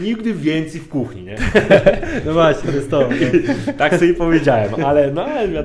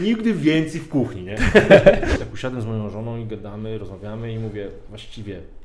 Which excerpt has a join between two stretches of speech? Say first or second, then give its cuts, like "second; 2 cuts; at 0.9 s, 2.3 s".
second; 1 cut; at 2.1 s